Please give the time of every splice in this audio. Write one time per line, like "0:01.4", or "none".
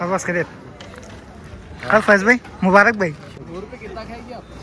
0:03.4